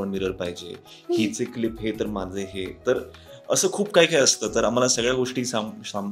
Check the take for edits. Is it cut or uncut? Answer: uncut